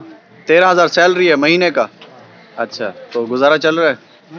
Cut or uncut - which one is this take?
uncut